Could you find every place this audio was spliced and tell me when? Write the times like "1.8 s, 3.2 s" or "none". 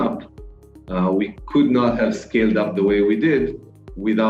none